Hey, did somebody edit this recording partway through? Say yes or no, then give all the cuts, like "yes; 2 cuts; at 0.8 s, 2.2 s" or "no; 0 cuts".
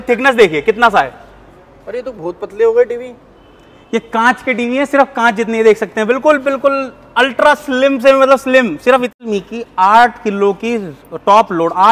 yes; 1 cut; at 9.2 s